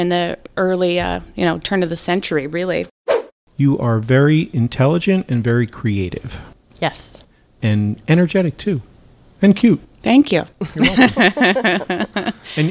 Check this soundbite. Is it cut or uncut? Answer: cut